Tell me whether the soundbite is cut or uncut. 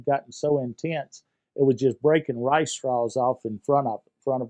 uncut